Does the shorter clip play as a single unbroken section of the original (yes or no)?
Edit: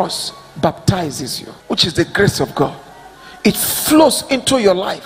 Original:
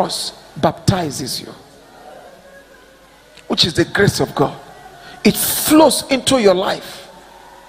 no